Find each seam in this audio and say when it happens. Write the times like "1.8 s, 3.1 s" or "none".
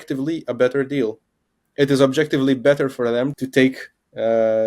3.3 s